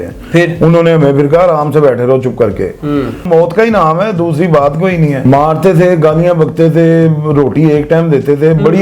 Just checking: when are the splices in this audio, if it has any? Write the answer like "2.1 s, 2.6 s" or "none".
3.2 s, 5.2 s